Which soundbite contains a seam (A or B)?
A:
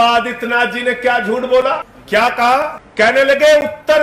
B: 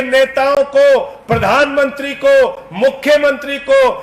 A